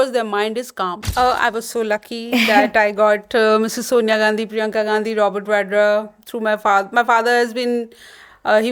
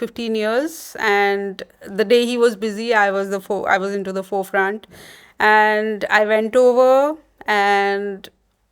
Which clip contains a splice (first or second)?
first